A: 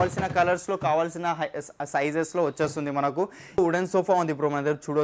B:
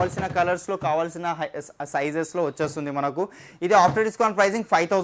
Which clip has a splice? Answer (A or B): A